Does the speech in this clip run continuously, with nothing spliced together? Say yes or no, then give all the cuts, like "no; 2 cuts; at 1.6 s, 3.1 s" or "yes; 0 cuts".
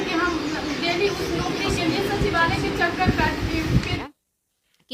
no; 1 cut; at 4.0 s